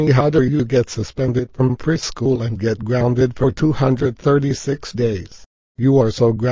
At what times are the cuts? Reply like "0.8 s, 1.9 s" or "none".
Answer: 5.3 s